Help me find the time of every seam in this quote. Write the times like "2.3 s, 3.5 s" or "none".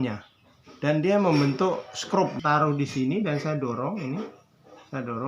2.3 s